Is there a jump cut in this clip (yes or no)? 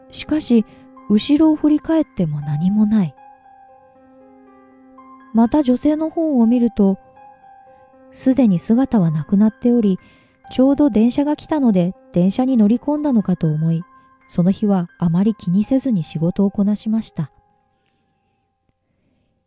no